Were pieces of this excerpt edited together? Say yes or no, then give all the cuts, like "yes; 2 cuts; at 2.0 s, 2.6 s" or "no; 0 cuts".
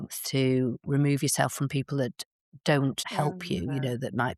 no; 0 cuts